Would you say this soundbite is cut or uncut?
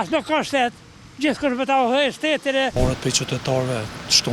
cut